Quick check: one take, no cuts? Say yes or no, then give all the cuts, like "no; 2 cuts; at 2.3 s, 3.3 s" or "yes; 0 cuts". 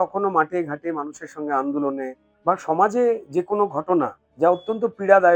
no; 2 cuts; at 2.2 s, 4.2 s